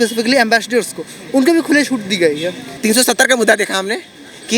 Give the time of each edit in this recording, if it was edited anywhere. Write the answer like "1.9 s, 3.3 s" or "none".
2.6 s